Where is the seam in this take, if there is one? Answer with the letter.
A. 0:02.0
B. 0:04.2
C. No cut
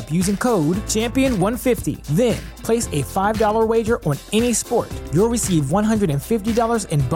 C